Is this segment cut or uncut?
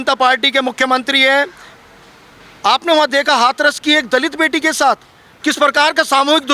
uncut